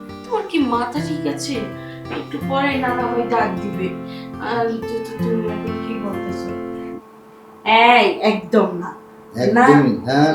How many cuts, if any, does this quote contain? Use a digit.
1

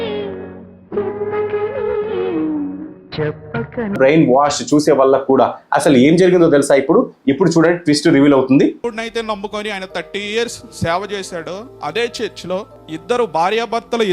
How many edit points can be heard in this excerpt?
1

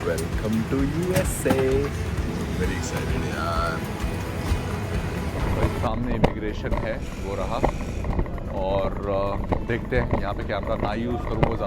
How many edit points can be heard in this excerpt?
1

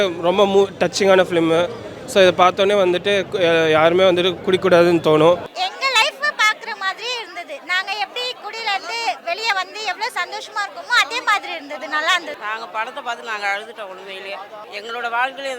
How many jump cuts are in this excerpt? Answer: 3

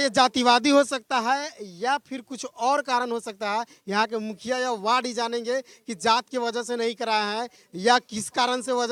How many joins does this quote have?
0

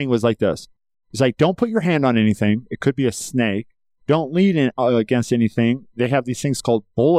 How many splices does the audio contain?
0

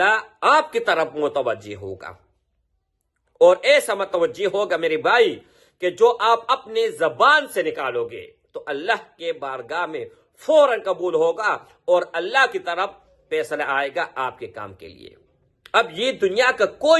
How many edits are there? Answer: 0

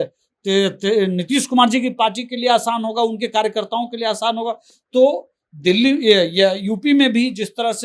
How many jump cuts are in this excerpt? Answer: 0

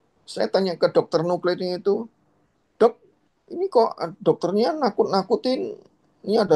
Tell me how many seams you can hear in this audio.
0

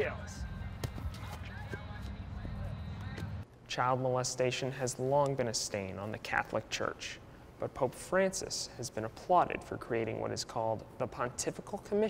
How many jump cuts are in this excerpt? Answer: 1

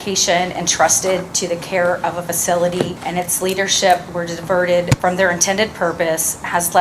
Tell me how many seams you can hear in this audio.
2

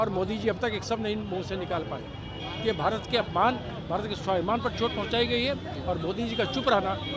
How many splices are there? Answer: 0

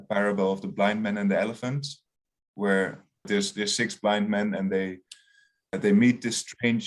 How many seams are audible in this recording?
1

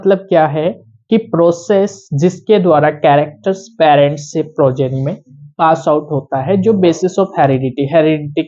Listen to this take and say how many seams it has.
0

